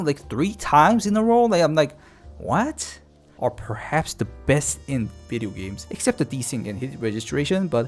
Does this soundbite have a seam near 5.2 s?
no; 1 cut; at 3.3 s

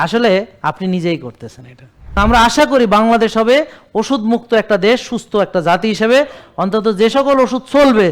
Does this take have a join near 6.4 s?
no; 1 cut; at 2.2 s

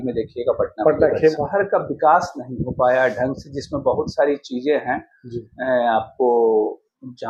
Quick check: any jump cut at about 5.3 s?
no; 1 cut; at 1.3 s

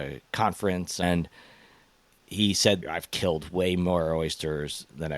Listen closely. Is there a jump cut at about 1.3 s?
no; 1 cut; at 2.8 s

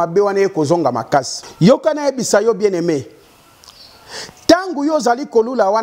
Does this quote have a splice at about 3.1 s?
no; 1 cut; at 1.4 s

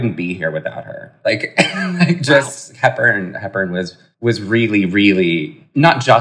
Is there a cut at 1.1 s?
no; 0 cuts

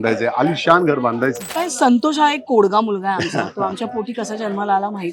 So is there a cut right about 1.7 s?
yes; 1 cut; at 1.7 s

